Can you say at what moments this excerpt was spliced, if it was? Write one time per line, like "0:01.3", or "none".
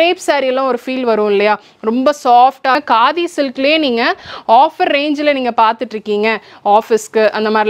0:02.8